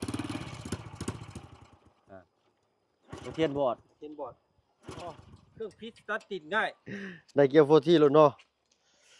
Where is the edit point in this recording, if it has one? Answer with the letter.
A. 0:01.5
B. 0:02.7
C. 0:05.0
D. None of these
C